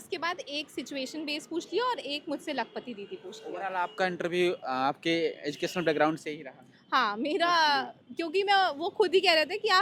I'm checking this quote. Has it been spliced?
no; 0 cuts

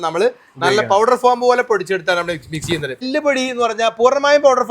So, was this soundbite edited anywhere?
yes; 1 cut; at 3.1 s

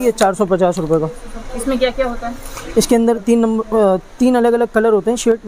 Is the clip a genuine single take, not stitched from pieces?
yes; 0 cuts

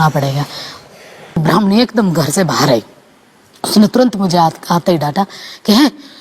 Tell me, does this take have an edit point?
yes; 1 cut; at 1.4 s

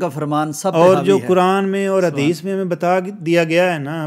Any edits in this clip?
no; 0 cuts

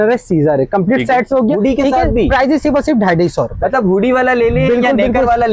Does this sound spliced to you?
yes; 1 cut; at 1.6 s

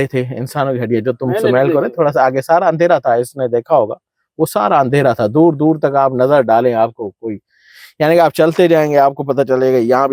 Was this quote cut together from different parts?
no; 0 cuts

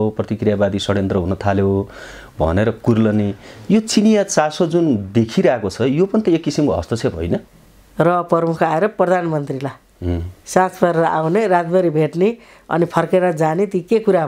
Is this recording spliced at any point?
yes; 1 cut; at 7.5 s

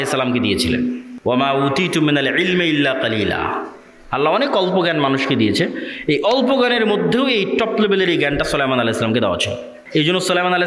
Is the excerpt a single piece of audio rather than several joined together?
no; 2 cuts; at 1.1 s, 9.7 s

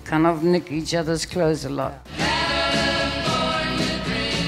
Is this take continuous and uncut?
no; 1 cut; at 2.0 s

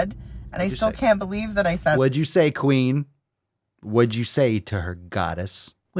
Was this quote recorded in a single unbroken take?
yes; 0 cuts

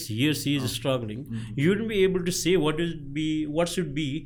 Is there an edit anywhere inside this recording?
no; 0 cuts

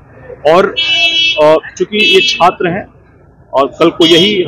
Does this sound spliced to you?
no; 0 cuts

